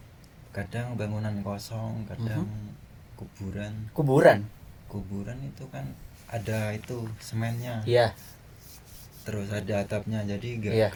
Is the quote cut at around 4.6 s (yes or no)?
no